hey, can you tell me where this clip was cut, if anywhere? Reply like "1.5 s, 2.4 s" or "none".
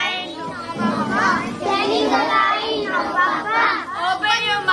none